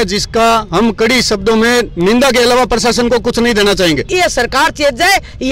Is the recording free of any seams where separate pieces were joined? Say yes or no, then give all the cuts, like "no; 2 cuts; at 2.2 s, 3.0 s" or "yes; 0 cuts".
no; 1 cut; at 4.1 s